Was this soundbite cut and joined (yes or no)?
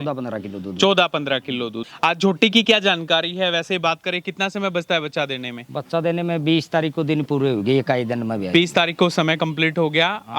yes